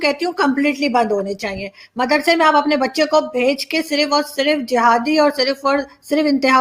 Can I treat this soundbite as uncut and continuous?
yes; 0 cuts

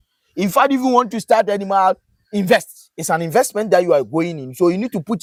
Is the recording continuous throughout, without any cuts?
yes; 0 cuts

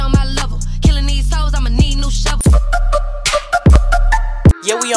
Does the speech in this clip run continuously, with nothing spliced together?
no; 1 cut; at 2.4 s

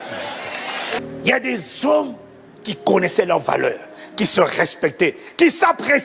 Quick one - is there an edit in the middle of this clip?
yes; 1 cut; at 1.0 s

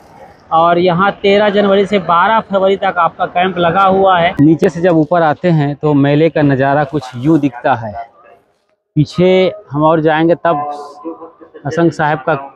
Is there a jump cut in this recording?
no; 0 cuts

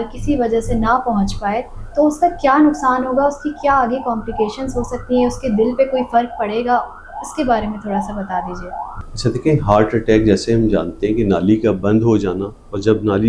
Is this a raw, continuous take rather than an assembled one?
yes; 0 cuts

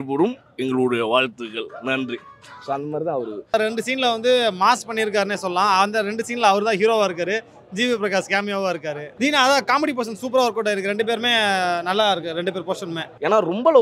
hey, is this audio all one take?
yes; 0 cuts

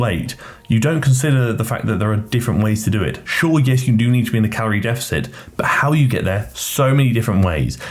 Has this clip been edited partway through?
no; 0 cuts

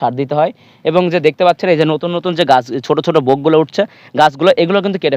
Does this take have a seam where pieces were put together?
no; 0 cuts

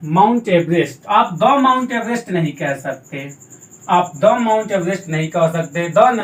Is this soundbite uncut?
yes; 0 cuts

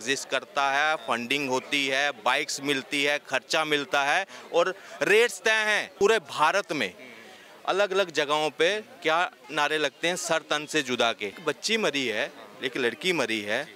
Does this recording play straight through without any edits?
no; 2 cuts; at 5.9 s, 11.4 s

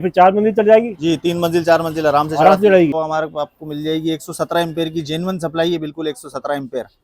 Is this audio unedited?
no; 1 cut; at 3.0 s

